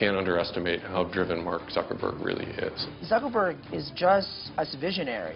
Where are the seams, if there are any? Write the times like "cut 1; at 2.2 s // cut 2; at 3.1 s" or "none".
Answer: cut 1; at 2.9 s // cut 2; at 4.4 s